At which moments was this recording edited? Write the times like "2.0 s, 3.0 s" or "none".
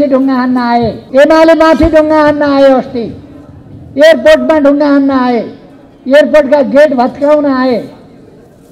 1.0 s